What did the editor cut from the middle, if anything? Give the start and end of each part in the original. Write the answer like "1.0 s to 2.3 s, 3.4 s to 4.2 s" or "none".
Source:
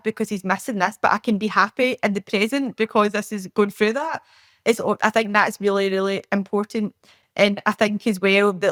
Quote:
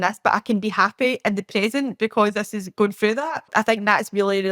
4.3 s to 5.0 s